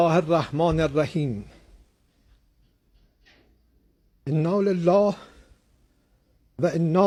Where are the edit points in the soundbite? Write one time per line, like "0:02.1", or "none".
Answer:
none